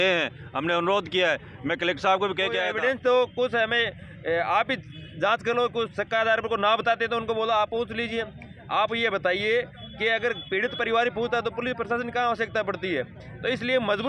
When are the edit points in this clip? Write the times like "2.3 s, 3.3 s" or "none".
2.7 s